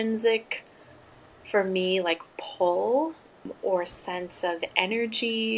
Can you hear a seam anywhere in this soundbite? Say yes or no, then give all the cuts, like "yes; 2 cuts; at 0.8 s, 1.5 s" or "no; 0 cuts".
yes; 1 cut; at 3.4 s